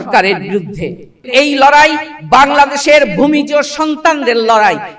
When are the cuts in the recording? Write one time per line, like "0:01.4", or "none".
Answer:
0:01.3